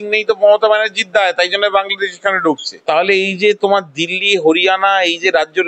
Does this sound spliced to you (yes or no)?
yes